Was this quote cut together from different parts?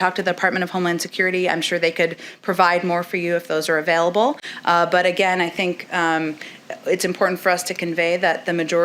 no; 0 cuts

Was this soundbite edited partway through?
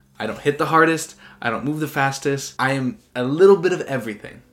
yes; 1 cut; at 2.5 s

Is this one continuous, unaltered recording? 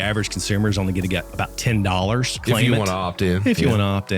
no; 2 cuts; at 1.3 s, 2.3 s

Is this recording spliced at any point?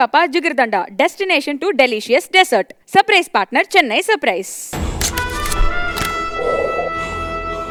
no; 0 cuts

